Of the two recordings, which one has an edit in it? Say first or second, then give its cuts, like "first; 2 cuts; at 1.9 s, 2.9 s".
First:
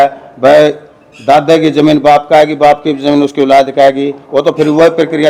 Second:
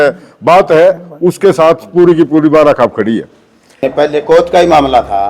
second; 1 cut; at 3.9 s